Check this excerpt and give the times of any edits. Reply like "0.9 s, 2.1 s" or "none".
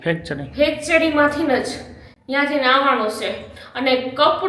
none